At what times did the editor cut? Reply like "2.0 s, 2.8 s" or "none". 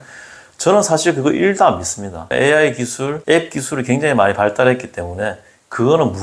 2.3 s, 3.2 s